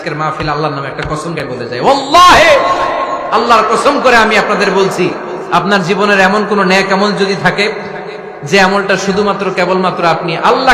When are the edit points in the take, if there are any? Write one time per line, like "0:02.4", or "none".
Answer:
0:01.4